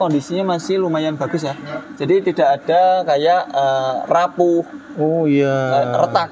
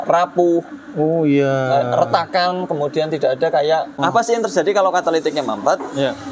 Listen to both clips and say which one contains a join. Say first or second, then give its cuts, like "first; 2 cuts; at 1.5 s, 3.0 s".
second; 1 cut; at 4.0 s